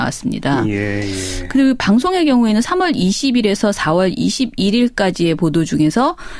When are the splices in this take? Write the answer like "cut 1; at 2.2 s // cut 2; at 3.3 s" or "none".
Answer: cut 1; at 3.1 s